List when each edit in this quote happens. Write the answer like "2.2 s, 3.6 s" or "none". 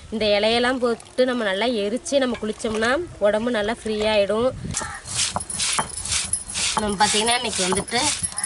4.7 s